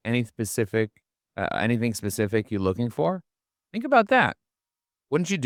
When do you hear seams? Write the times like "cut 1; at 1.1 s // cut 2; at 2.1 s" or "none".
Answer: none